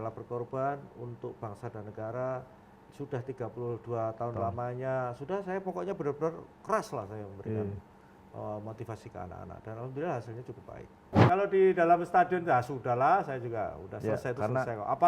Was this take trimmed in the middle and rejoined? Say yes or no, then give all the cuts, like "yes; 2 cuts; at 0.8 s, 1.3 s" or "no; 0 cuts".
yes; 1 cut; at 11.1 s